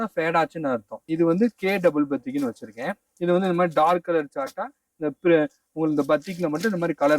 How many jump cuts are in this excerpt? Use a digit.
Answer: 1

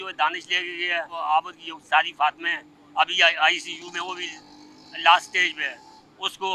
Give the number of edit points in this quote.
1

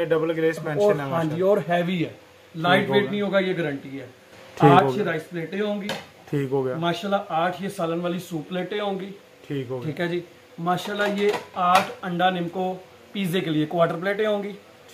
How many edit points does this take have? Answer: 0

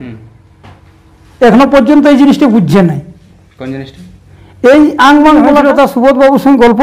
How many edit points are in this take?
1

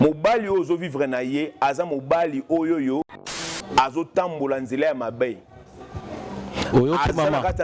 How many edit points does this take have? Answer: 0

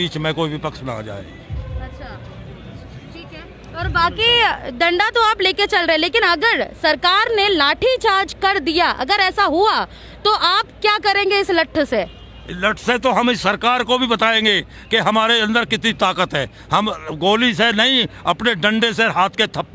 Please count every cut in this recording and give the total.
0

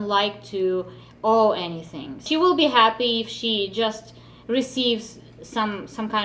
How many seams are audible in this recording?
1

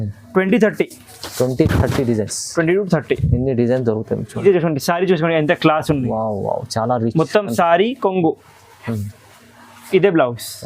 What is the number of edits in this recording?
1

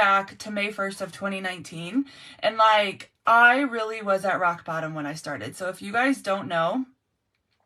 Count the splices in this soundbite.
0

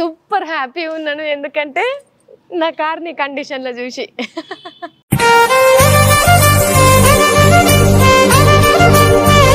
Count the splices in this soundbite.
0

